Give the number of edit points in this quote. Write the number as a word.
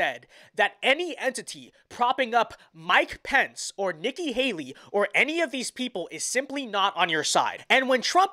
zero